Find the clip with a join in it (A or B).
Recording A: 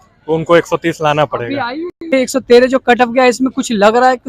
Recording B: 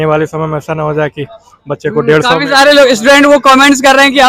A